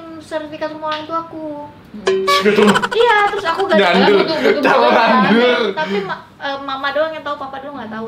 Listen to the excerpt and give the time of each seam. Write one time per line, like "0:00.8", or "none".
none